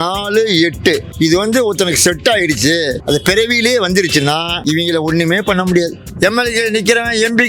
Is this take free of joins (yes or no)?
no